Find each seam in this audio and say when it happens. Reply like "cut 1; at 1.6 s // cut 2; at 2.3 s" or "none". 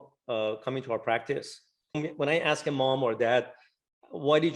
cut 1; at 2.0 s